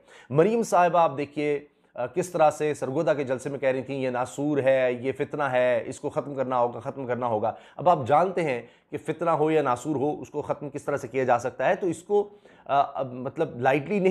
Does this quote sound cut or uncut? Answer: uncut